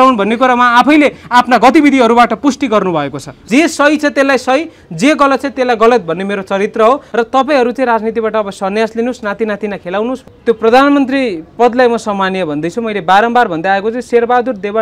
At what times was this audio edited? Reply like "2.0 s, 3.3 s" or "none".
3.4 s, 7.1 s, 10.3 s